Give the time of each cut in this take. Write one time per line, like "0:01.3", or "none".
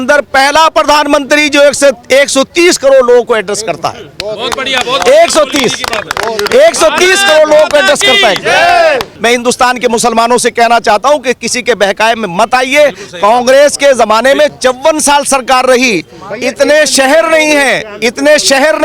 0:09.1
0:14.5